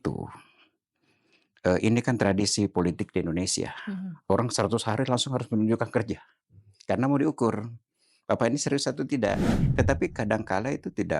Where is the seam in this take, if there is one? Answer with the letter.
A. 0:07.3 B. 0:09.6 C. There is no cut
B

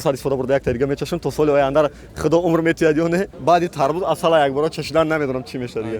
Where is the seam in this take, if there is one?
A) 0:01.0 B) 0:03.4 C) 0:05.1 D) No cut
B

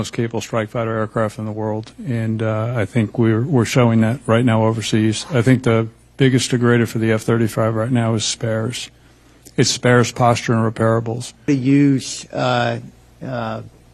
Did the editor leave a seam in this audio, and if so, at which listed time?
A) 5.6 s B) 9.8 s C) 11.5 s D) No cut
C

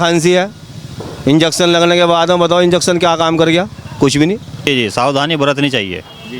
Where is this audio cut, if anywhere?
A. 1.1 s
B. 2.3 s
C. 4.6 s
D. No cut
C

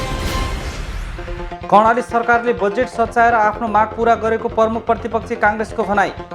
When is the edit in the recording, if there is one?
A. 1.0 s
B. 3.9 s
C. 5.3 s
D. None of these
A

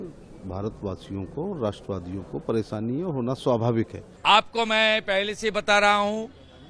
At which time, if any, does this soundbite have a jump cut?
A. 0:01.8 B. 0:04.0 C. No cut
B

